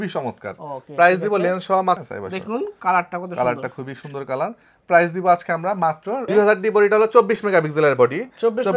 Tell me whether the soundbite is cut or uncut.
cut